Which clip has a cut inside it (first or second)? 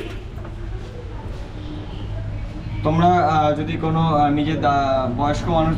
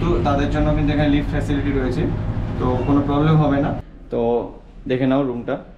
second